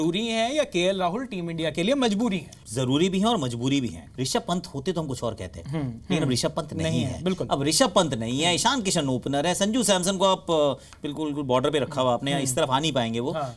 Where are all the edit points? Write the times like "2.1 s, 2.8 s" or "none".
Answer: 2.6 s, 4.0 s